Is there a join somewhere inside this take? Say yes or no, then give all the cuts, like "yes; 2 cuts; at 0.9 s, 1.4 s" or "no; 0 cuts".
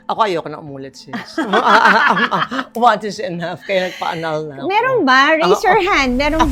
no; 0 cuts